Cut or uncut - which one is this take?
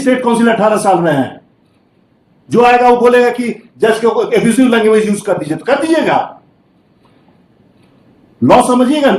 uncut